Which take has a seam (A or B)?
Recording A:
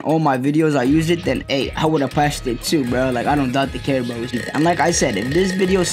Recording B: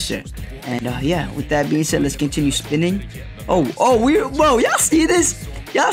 A